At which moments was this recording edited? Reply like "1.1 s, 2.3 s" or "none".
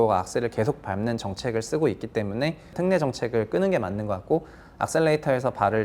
2.7 s